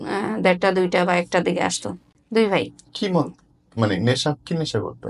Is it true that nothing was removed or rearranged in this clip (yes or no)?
yes